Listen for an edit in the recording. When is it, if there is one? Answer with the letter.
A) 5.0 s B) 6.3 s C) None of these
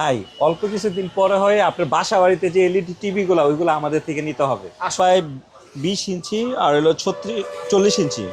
A